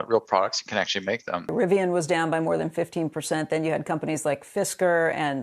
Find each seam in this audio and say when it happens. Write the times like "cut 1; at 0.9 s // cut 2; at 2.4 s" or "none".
cut 1; at 1.5 s